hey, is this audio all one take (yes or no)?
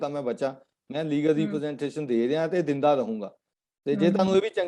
yes